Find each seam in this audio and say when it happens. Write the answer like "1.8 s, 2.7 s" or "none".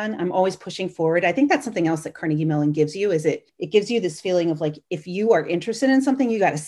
none

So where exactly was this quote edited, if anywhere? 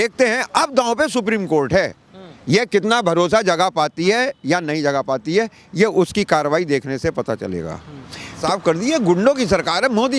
8.4 s

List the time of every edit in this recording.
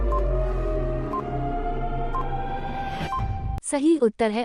3.4 s

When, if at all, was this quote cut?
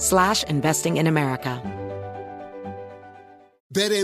1.6 s

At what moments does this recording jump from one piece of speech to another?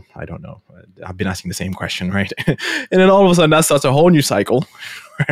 none

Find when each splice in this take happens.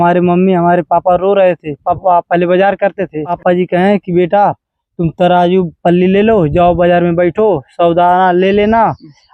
1.8 s, 3.4 s

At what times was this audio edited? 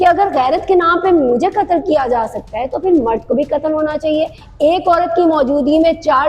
4.4 s

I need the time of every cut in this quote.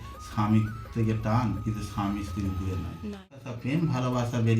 3.5 s

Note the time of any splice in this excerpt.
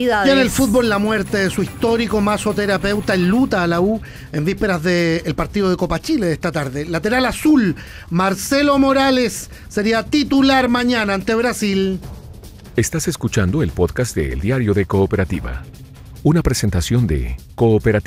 12.4 s

